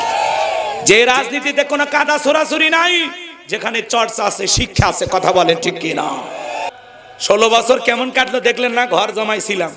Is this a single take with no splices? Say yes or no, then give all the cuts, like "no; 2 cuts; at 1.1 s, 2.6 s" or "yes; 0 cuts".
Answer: no; 1 cut; at 6.7 s